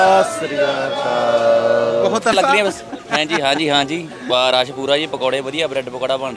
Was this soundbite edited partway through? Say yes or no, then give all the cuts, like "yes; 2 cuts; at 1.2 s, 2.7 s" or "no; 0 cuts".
yes; 1 cut; at 2.3 s